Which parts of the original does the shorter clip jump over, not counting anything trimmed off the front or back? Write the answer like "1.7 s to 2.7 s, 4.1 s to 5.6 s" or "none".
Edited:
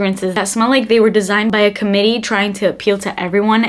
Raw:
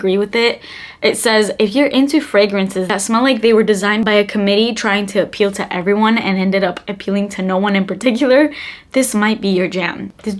none